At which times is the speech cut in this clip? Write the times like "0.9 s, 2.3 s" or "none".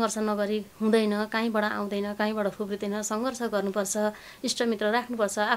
none